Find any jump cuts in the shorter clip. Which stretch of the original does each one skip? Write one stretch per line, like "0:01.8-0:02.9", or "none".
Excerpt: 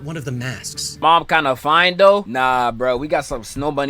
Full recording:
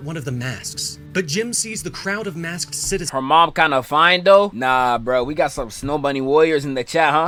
0:01.0-0:03.3